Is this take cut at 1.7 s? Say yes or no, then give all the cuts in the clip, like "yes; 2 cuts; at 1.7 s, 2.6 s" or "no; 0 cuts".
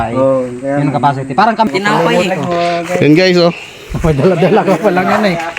yes; 1 cut; at 1.7 s